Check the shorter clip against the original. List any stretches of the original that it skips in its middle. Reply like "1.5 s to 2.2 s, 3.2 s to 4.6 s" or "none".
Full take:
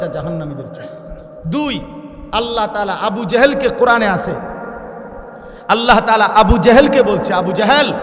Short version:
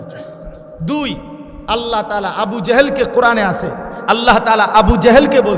4.5 s to 5.5 s